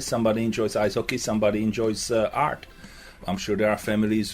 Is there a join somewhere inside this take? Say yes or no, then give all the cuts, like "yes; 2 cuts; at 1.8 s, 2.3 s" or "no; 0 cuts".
yes; 1 cut; at 3.2 s